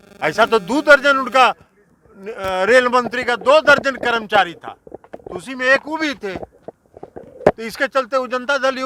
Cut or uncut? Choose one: uncut